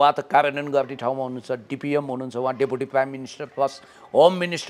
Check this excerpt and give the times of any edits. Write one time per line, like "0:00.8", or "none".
none